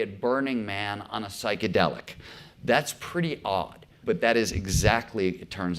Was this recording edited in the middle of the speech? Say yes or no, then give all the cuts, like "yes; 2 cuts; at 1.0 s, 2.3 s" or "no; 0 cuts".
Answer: yes; 1 cut; at 4.0 s